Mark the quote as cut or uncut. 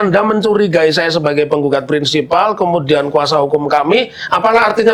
uncut